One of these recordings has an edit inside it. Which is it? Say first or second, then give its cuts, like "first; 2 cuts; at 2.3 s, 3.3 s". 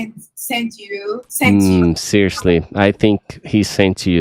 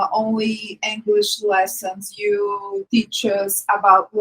second; 1 cut; at 2.8 s